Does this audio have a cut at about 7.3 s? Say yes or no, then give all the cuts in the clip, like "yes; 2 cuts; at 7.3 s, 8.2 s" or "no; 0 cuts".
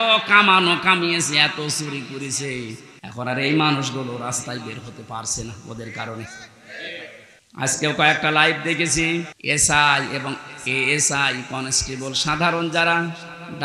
yes; 3 cuts; at 2.9 s, 7.3 s, 9.3 s